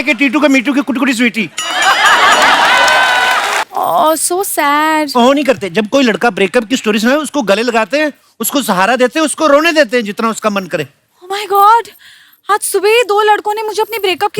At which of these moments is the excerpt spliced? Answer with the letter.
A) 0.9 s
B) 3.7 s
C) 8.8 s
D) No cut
B